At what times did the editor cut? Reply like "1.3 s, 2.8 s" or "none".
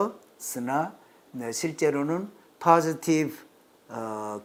none